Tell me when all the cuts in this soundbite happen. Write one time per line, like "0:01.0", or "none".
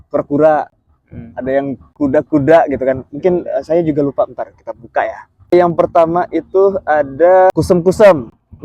0:05.5
0:07.5